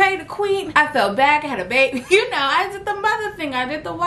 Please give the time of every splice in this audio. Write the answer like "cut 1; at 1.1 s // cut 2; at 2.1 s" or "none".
cut 1; at 2.0 s